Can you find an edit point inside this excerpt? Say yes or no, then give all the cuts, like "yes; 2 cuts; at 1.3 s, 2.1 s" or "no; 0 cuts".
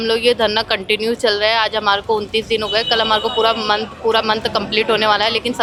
no; 0 cuts